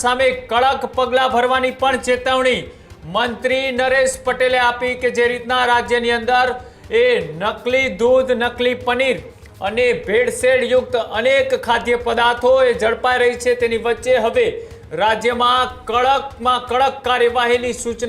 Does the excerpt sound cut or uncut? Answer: uncut